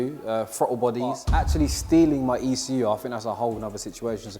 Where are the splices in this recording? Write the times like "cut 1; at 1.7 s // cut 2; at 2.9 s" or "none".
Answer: cut 1; at 1.3 s